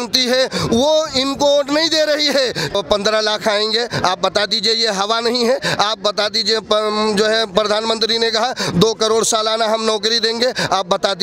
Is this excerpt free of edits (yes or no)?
no